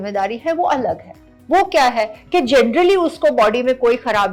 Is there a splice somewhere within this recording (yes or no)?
no